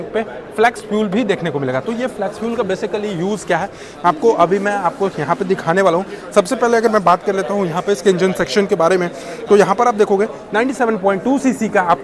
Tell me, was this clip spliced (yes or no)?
no